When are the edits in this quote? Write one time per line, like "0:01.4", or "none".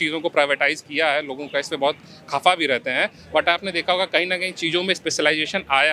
none